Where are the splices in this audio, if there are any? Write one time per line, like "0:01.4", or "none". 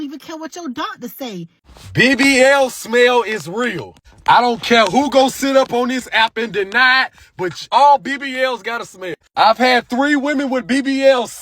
0:01.7
0:09.2